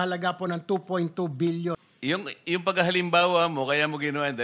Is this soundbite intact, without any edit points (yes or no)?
no